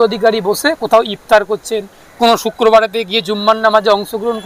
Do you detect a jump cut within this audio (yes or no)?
no